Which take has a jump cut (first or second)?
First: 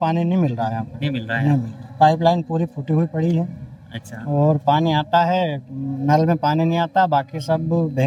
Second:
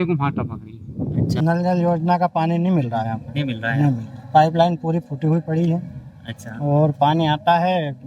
second